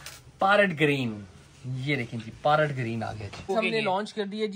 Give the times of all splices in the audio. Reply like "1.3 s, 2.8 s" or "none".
3.5 s